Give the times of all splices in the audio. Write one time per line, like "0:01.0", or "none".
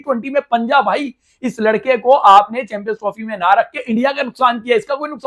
none